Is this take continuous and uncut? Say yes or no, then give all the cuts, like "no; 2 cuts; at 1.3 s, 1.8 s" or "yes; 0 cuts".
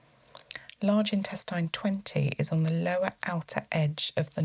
yes; 0 cuts